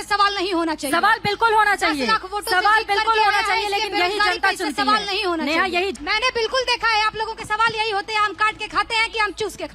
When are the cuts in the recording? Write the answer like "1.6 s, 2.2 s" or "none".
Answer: 5.9 s